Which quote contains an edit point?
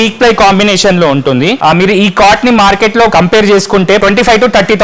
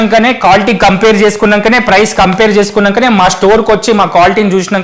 first; 3 cuts; at 1.6 s, 3.1 s, 4.0 s

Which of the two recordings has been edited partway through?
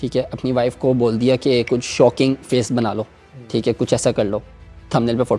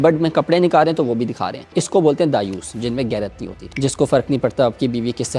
second; 1 cut; at 1.8 s

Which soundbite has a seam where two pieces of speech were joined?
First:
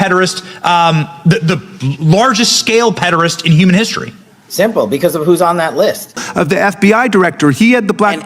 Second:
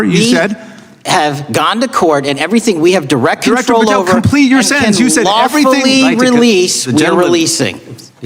first; 1 cut; at 6.2 s

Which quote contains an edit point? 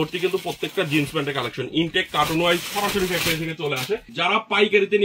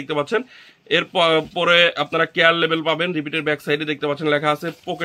first; 1 cut; at 4.1 s

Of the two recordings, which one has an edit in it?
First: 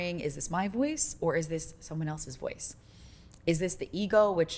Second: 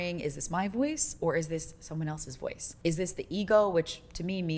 second; 1 cut; at 2.7 s

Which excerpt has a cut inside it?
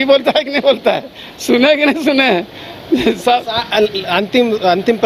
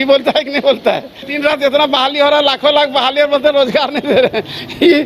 second; 1 cut; at 1.2 s

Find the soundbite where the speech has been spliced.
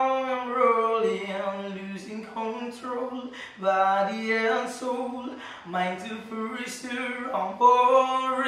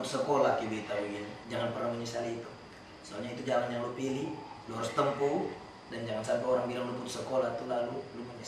second; 1 cut; at 1.4 s

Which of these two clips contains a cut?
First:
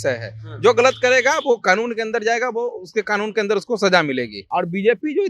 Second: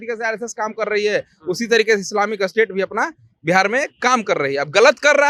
first; 1 cut; at 4.4 s

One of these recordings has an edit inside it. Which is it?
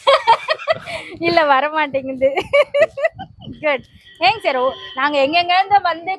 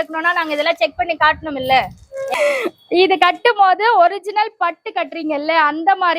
second; 1 cut; at 2.3 s

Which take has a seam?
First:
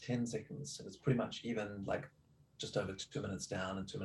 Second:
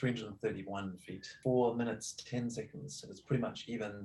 second; 1 cut; at 1.3 s

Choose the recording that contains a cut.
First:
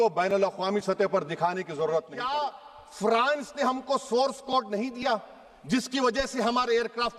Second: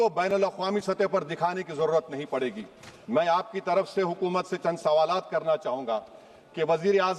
first; 1 cut; at 2.2 s

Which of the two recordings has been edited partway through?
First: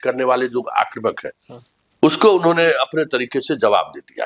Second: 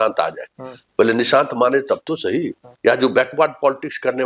second; 1 cut; at 2.6 s

